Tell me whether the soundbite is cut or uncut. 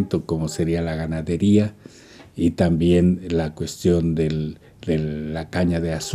uncut